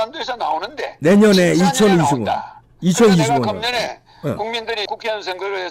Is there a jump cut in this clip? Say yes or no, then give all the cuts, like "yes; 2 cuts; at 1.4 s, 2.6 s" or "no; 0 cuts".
no; 0 cuts